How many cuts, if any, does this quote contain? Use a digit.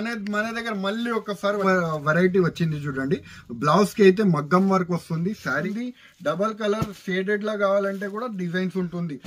2